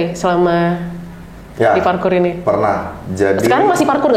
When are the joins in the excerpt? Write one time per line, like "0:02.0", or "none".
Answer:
none

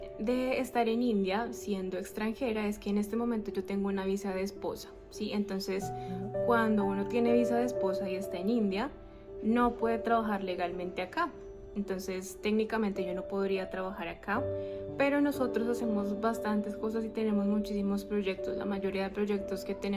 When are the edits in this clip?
none

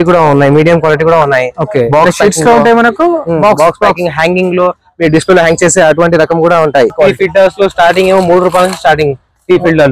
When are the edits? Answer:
0:06.9

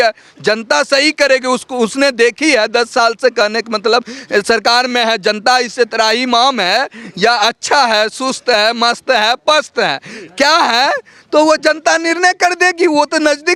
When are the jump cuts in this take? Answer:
none

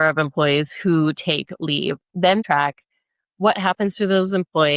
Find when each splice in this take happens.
0:02.4

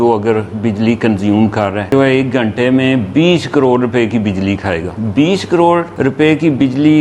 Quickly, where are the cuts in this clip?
0:01.9
0:05.0
0:05.9

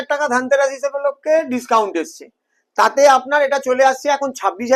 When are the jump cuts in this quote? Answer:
none

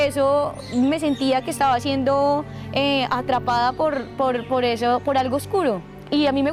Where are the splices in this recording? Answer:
none

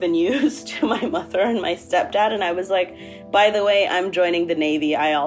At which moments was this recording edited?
none

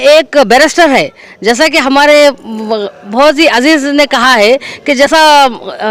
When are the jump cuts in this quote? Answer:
none

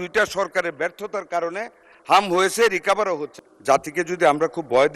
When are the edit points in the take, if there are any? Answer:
0:03.3

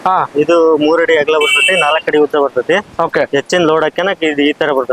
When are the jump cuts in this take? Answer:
none

